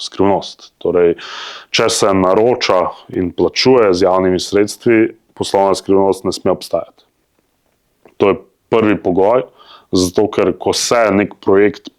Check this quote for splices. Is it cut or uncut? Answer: uncut